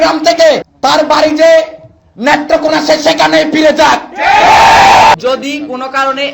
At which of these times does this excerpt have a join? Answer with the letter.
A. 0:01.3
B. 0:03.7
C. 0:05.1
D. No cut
C